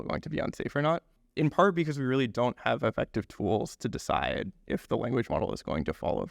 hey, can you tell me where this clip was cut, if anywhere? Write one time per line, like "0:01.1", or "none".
0:01.2